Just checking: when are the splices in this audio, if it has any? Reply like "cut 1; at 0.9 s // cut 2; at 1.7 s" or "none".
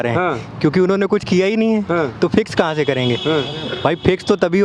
none